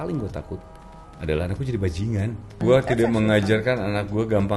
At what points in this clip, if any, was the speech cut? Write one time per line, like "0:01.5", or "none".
0:02.6